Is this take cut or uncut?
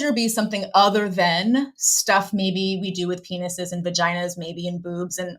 uncut